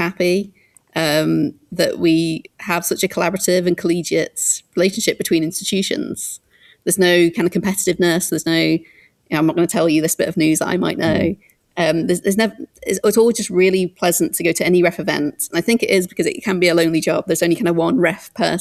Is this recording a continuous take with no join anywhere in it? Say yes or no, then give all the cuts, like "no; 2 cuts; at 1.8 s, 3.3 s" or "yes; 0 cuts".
yes; 0 cuts